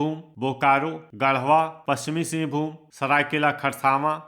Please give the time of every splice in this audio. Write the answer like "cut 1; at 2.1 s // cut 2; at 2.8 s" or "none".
cut 1; at 1.0 s